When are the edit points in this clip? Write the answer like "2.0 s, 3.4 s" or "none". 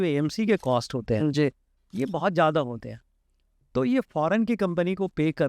none